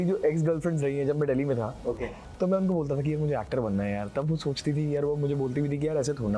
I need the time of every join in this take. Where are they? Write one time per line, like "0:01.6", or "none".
none